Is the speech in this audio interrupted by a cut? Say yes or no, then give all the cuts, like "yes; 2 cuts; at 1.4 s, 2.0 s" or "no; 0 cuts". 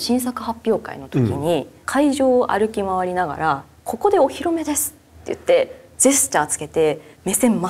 no; 0 cuts